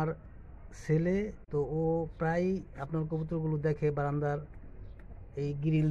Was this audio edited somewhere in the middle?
yes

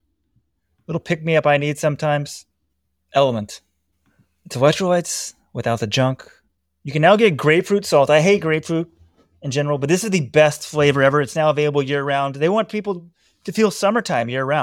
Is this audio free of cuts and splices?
yes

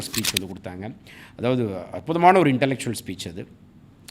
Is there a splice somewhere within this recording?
no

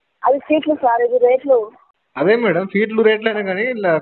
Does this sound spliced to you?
no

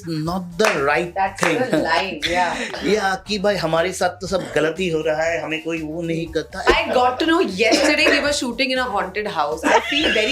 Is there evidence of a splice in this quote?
yes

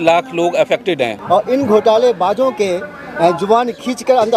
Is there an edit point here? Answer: yes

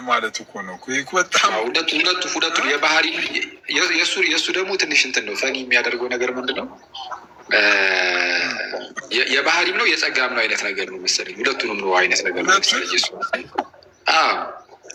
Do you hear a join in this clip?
no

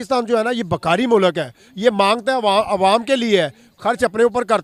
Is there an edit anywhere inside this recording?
no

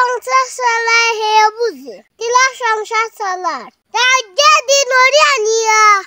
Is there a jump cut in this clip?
no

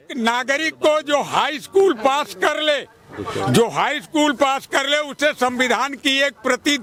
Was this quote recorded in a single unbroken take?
yes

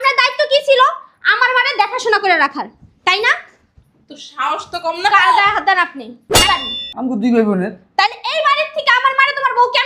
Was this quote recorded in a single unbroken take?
no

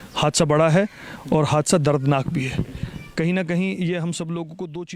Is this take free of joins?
yes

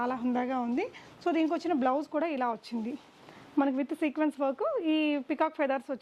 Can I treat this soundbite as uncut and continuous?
yes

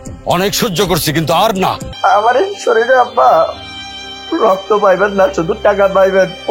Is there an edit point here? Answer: yes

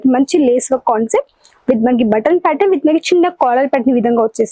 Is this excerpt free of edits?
yes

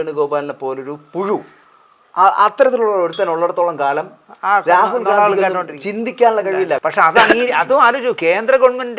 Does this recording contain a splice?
yes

